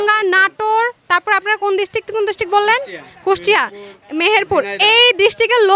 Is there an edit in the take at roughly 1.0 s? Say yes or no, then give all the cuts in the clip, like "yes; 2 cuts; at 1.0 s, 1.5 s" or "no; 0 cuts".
no; 0 cuts